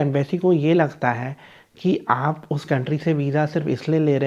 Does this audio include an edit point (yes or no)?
no